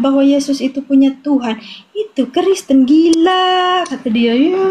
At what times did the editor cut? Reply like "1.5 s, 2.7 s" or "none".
none